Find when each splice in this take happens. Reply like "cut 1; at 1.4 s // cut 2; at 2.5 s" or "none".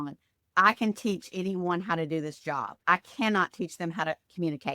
cut 1; at 2.7 s